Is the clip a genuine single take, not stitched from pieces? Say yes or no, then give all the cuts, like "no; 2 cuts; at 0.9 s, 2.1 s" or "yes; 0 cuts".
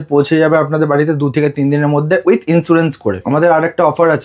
no; 1 cut; at 3.2 s